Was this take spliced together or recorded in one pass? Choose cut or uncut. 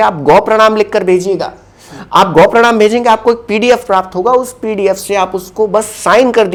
uncut